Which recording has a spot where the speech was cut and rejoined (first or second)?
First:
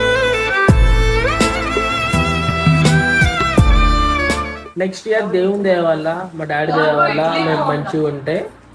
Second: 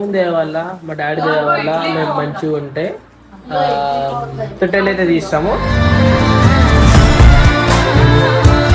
first